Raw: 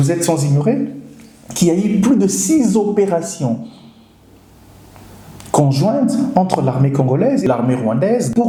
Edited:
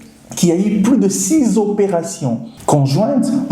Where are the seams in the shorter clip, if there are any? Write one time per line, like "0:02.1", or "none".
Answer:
0:02.5